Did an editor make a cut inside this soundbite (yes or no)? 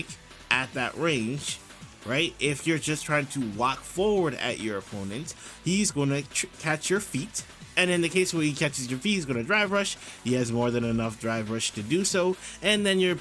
no